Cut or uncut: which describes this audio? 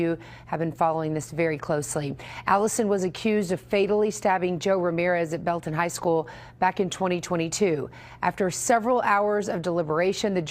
uncut